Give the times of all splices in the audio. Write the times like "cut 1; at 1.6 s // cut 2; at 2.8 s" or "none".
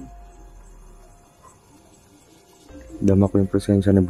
none